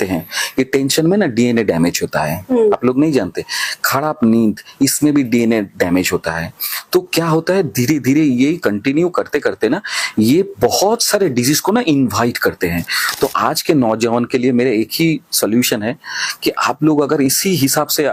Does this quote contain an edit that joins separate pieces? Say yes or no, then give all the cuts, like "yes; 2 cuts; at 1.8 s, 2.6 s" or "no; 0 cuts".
no; 0 cuts